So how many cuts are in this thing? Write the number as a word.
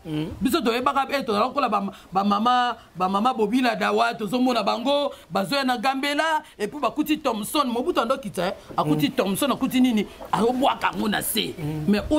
zero